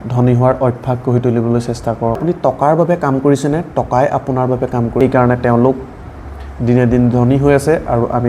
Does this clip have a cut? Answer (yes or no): yes